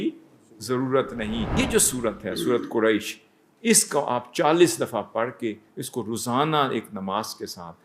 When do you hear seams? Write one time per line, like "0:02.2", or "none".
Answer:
0:01.5

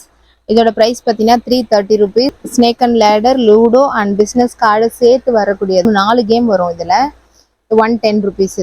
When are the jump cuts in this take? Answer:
0:02.3

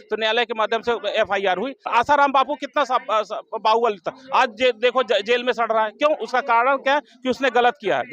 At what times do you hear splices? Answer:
0:01.9

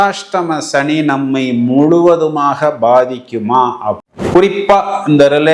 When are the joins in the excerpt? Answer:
0:04.3

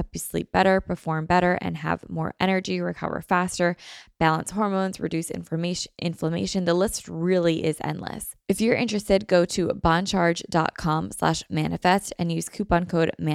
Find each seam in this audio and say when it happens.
0:08.3

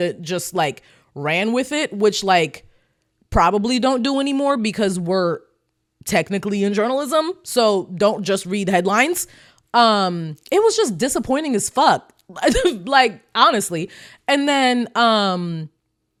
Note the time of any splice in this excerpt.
none

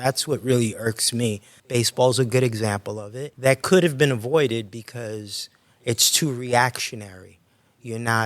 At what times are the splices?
0:01.5
0:03.2

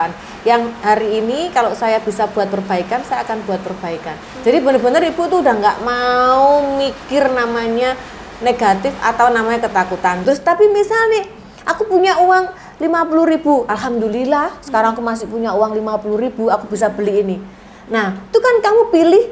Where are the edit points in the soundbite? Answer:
0:10.2

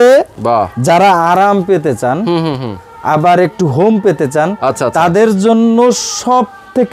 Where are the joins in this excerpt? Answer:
none

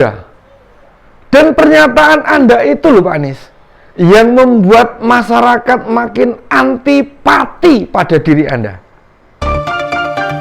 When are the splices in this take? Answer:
0:09.4

